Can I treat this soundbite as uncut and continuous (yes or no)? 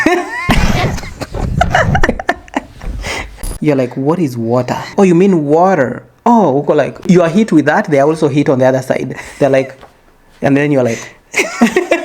no